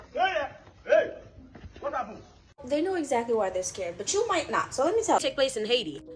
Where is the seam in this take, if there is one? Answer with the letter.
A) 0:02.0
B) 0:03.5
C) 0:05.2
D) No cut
C